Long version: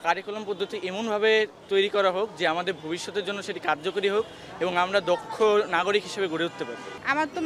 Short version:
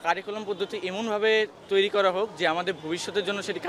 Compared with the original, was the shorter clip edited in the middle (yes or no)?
no